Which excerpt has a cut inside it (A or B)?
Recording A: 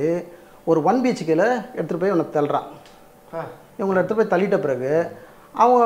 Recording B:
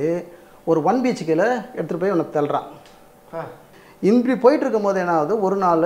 B